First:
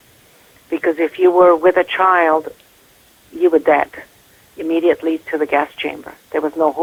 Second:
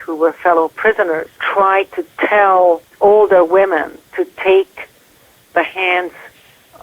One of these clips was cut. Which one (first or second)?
second